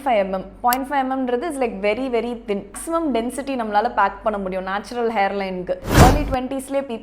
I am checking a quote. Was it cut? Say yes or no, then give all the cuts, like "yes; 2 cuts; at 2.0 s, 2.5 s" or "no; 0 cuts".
yes; 2 cuts; at 2.8 s, 5.9 s